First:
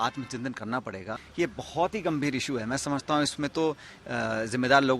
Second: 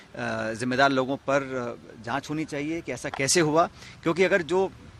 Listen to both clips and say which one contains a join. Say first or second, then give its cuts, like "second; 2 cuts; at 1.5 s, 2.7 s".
first; 1 cut; at 1.2 s